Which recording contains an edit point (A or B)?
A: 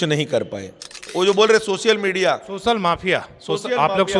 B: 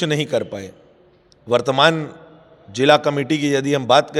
A